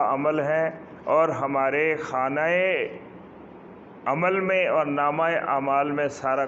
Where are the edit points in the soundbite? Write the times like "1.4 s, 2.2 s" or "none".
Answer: none